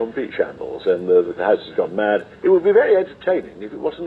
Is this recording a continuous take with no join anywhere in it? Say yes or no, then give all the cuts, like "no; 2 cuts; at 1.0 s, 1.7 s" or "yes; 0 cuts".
no; 2 cuts; at 1.3 s, 2.3 s